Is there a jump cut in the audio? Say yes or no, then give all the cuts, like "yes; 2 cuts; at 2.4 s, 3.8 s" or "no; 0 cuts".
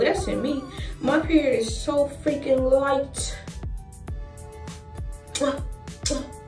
no; 0 cuts